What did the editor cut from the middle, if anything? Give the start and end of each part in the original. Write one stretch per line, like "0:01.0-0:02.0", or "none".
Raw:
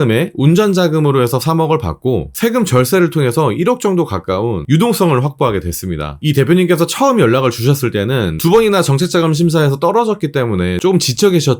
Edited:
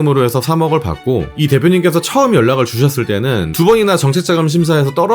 0:02.3-0:06.1